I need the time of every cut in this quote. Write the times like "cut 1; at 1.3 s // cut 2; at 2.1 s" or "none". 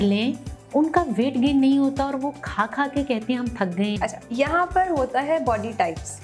cut 1; at 3.9 s